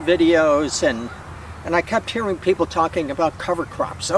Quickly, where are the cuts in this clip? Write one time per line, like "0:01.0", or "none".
none